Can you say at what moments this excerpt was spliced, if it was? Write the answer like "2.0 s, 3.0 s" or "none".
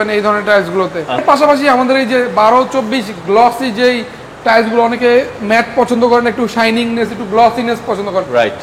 1.2 s

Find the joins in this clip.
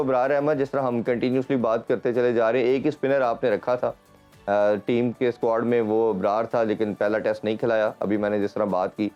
none

